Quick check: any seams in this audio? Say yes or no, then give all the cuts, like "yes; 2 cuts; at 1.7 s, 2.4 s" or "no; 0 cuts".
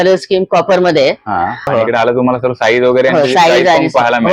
yes; 1 cut; at 1.7 s